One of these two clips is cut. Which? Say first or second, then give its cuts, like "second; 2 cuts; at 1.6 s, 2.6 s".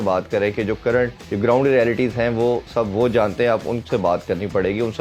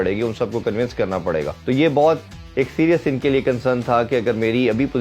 second; 1 cut; at 1.5 s